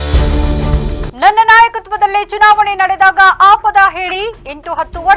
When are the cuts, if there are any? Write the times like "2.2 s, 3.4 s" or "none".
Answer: 1.1 s